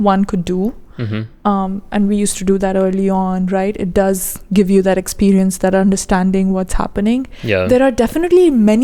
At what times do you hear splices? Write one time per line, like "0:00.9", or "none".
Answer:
none